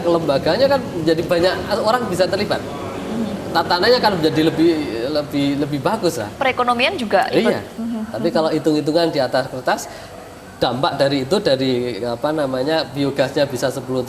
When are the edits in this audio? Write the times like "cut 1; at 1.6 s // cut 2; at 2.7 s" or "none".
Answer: cut 1; at 7.7 s